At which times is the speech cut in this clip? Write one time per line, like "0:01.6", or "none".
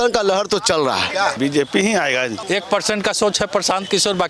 0:01.3
0:02.4